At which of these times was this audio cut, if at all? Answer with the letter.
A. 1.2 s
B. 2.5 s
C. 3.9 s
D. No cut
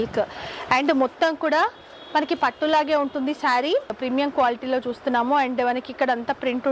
C